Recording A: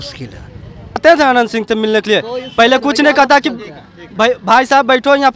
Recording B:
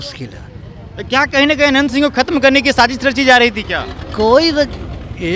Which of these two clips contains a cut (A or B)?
A